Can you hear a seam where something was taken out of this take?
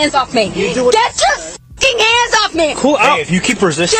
no; 0 cuts

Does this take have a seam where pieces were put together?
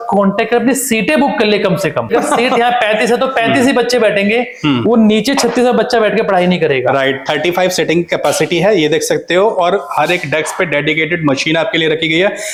no; 0 cuts

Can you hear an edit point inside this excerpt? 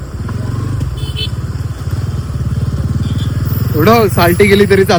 no; 0 cuts

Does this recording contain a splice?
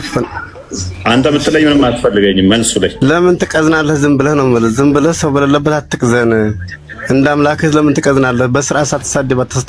yes; 1 cut; at 2.9 s

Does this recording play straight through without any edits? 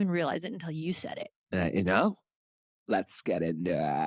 yes; 0 cuts

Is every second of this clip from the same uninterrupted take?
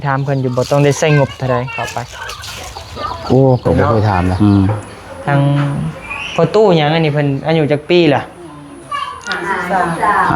no; 1 cut; at 4.3 s

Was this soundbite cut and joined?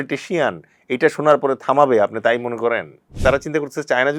yes; 1 cut; at 3.1 s

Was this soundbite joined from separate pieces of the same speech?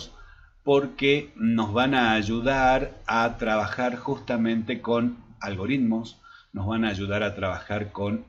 no; 0 cuts

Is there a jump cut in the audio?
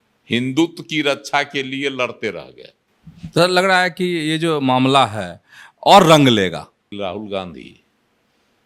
yes; 2 cuts; at 2.9 s, 6.9 s

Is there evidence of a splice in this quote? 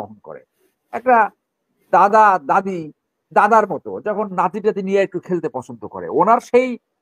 no; 0 cuts

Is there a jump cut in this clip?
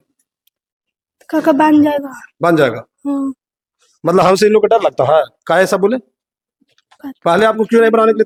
no; 0 cuts

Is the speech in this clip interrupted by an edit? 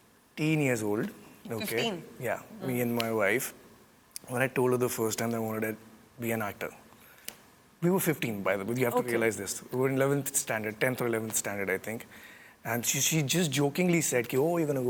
no; 0 cuts

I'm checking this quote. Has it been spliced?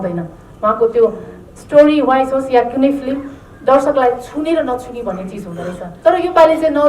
yes; 1 cut; at 5.9 s

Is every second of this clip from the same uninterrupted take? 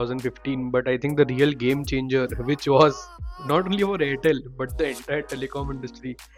yes; 0 cuts

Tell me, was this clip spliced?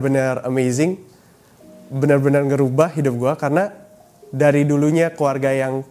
no; 0 cuts

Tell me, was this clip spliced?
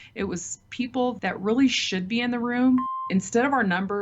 yes; 1 cut; at 2.9 s

